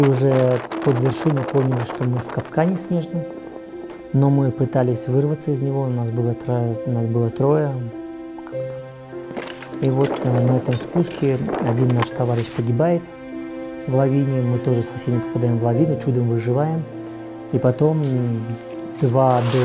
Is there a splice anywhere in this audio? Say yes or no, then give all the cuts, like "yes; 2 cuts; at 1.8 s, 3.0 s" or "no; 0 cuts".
no; 0 cuts